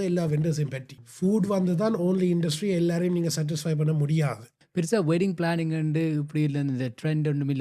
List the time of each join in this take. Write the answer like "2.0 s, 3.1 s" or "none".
1.0 s, 4.6 s